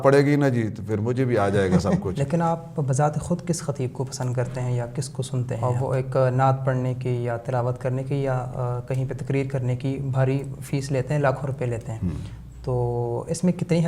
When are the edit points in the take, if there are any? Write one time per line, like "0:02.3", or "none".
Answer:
0:02.1
0:05.5

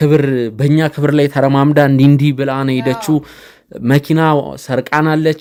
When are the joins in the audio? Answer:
none

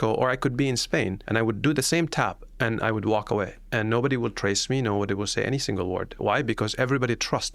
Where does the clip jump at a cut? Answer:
0:01.2

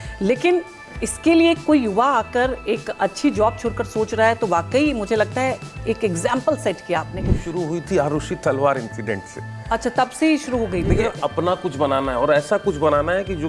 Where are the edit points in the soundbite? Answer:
0:07.4
0:11.1

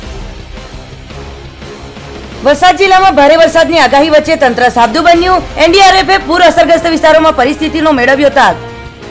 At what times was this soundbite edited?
0:02.3

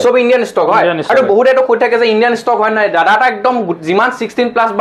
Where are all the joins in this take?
none

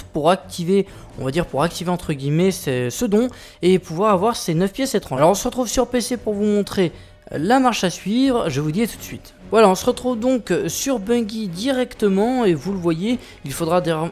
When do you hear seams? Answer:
0:11.7

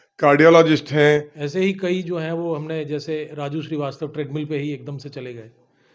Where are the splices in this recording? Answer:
0:01.4

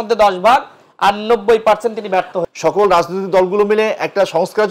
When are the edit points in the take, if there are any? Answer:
0:02.3

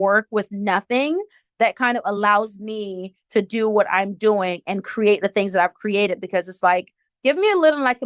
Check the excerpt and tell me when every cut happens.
0:07.0

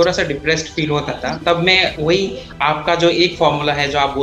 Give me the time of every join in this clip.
0:02.1

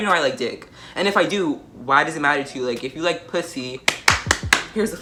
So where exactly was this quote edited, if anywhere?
none

